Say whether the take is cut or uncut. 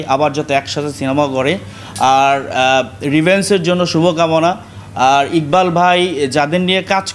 uncut